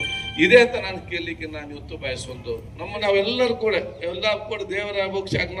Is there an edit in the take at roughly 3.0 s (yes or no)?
yes